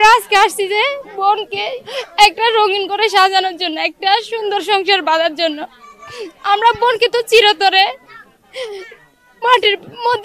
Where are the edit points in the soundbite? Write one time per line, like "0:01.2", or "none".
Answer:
0:01.1
0:01.8

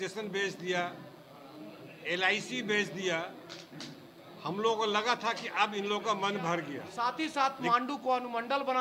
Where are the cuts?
0:06.8

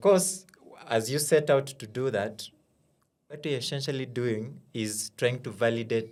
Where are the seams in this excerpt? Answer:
none

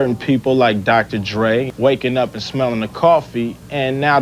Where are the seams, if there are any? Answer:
0:01.7

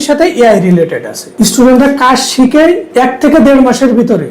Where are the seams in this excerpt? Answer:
0:01.2

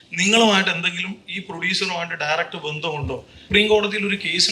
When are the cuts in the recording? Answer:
0:03.4

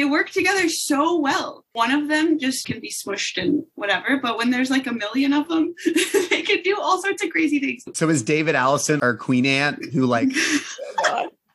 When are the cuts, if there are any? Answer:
0:08.0

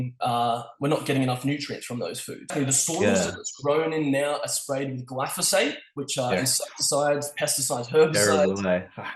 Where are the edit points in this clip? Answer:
0:02.5

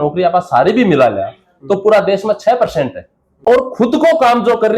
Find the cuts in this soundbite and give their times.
0:03.5

